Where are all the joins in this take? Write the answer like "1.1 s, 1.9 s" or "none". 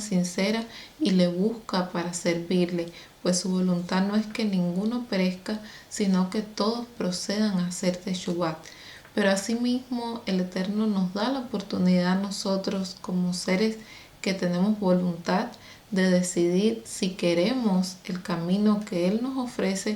none